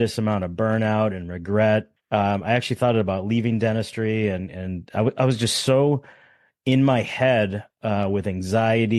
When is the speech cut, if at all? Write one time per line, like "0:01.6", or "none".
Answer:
0:02.0